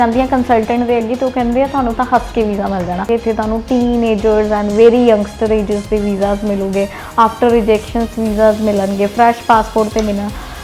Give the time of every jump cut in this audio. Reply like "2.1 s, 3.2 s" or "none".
3.1 s